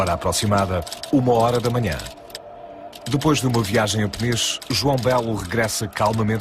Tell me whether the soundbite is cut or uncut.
cut